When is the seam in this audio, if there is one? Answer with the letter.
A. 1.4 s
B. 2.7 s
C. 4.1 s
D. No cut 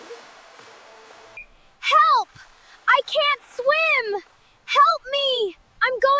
A